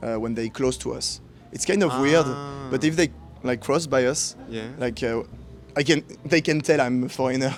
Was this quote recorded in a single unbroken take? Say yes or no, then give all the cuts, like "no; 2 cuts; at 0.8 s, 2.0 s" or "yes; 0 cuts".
yes; 0 cuts